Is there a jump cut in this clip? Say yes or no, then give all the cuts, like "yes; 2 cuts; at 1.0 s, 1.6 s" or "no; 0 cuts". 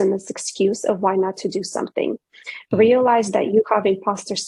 no; 0 cuts